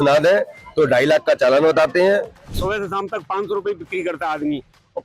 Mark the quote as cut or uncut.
cut